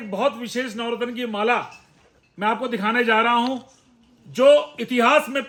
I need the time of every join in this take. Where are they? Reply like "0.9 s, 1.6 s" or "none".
none